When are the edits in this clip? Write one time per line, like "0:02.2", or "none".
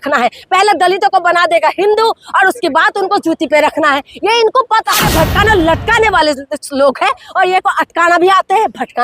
0:04.9